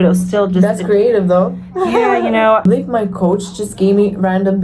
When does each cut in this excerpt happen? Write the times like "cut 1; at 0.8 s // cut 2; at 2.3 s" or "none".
cut 1; at 2.6 s